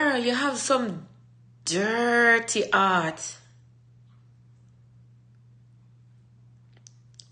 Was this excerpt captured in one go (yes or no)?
yes